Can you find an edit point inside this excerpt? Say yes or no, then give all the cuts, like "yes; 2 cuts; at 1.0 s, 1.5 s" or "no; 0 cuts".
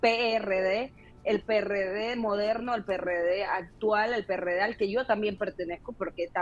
no; 0 cuts